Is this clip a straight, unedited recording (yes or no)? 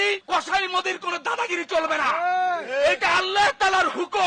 yes